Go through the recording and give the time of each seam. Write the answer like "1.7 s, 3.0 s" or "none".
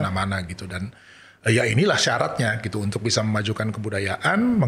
none